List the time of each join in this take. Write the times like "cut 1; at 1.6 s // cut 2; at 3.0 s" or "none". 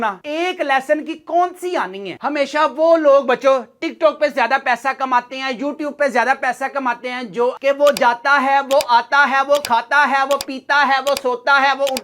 cut 1; at 2.1 s // cut 2; at 7.6 s